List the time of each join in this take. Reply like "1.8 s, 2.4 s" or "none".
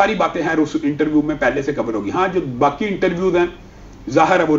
none